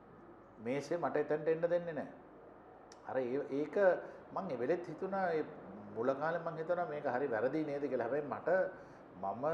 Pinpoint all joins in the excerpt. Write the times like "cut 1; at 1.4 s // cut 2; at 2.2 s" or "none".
none